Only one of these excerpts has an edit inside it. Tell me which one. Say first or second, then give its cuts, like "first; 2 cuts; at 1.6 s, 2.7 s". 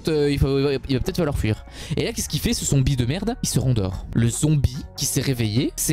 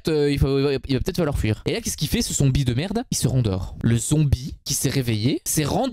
second; 1 cut; at 1.6 s